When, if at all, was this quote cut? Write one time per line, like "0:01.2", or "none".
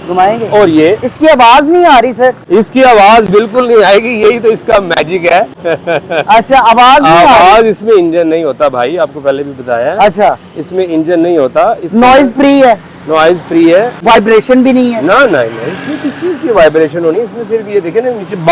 0:02.4
0:05.6
0:14.0